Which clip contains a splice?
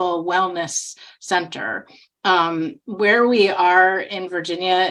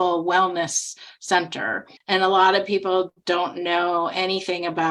second; 1 cut; at 1.9 s

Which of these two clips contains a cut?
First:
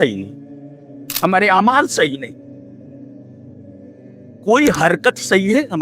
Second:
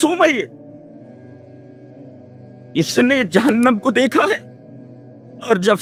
first; 2 cuts; at 2.9 s, 4.4 s

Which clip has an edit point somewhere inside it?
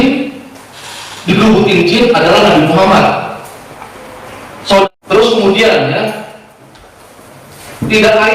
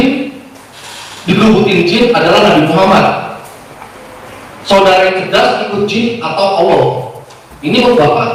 first; 1 cut; at 4.9 s

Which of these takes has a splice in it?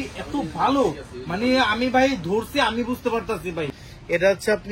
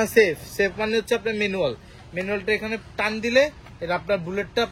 first; 1 cut; at 3.7 s

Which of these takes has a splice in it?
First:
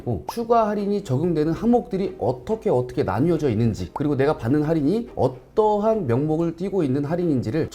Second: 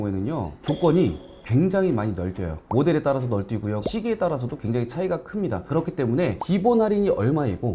second; 1 cut; at 6.4 s

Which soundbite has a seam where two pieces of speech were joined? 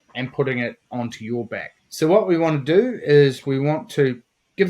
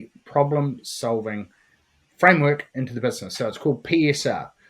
first; 1 cut; at 1.8 s

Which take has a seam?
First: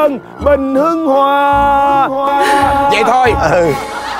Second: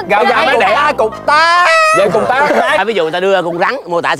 second; 1 cut; at 2.8 s

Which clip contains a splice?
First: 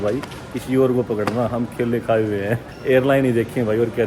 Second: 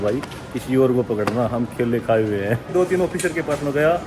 second; 1 cut; at 2.7 s

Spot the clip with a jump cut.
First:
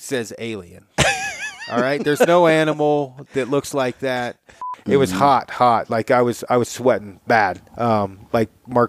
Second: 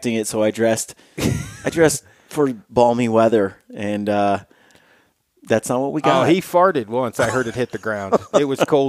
first; 1 cut; at 4.7 s

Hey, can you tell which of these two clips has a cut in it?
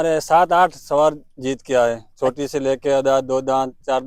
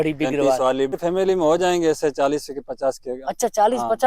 second; 1 cut; at 0.9 s

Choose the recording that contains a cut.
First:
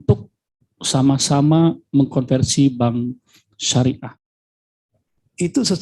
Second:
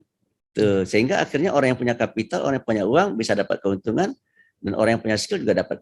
first; 1 cut; at 4.4 s

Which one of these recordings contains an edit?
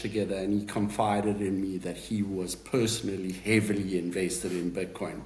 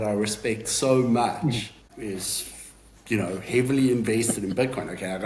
second; 1 cut; at 1.9 s

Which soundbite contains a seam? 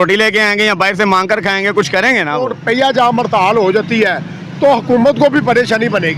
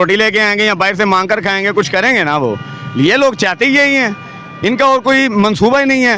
first; 1 cut; at 2.5 s

